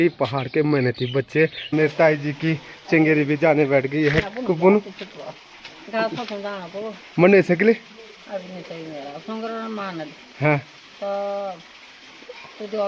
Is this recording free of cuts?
no; 1 cut; at 1.7 s

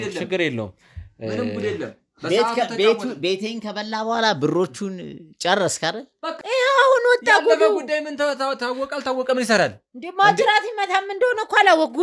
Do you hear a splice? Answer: yes; 1 cut; at 6.3 s

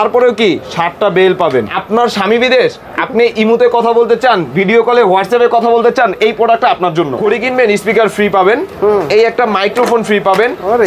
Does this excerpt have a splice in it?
yes; 2 cuts; at 1.7 s, 7.2 s

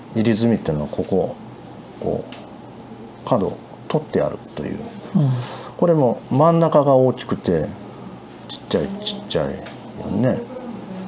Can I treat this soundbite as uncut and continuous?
yes; 0 cuts

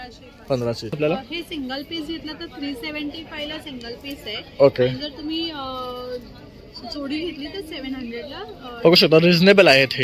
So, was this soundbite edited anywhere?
yes; 1 cut; at 0.9 s

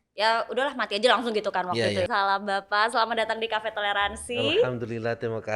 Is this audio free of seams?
yes; 0 cuts

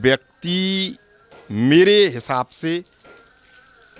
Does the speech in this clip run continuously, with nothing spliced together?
yes; 0 cuts

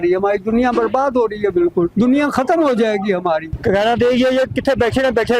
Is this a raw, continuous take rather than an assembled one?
no; 2 cuts; at 1.9 s, 3.6 s

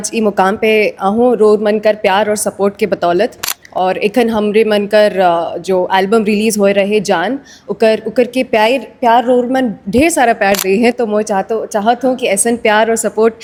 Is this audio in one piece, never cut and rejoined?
yes; 0 cuts

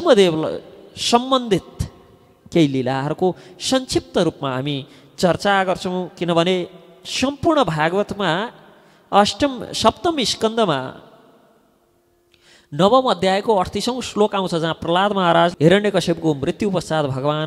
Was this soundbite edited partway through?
yes; 1 cut; at 15.5 s

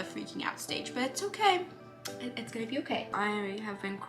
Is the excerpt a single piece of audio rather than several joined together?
no; 1 cut; at 3.1 s

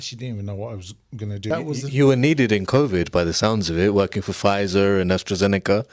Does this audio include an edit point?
yes; 1 cut; at 1.4 s

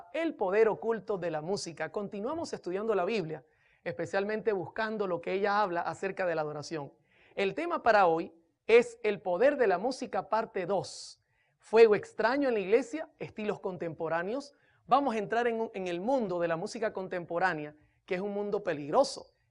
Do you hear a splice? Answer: yes; 1 cut; at 16.6 s

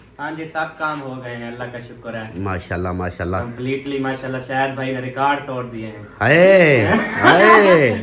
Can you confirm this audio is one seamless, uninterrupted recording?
yes; 0 cuts

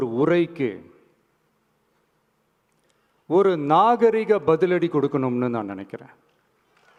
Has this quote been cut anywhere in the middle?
no; 0 cuts

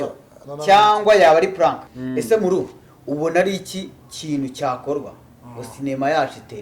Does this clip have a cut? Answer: yes; 1 cut; at 1.9 s

